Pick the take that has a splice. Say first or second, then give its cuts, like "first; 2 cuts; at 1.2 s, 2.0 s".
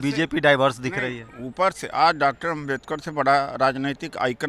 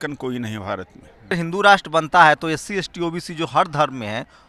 second; 1 cut; at 1.4 s